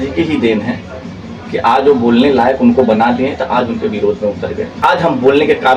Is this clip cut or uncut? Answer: cut